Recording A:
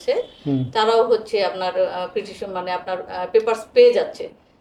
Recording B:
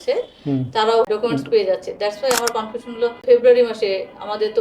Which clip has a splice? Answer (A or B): B